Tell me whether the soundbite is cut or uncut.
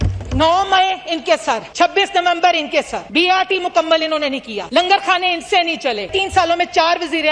cut